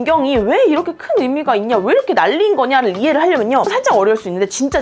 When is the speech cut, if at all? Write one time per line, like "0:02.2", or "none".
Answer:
0:03.6